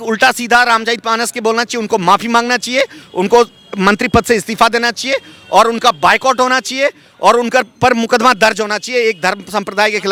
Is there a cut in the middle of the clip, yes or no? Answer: no